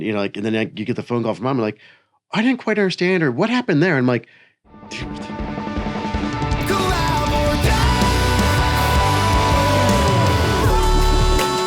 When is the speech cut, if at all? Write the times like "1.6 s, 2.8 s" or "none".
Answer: 5.3 s